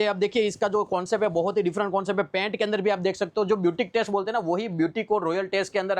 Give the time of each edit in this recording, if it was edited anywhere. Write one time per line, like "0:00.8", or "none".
none